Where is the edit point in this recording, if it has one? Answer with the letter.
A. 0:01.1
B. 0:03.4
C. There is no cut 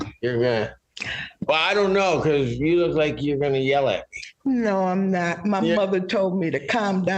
C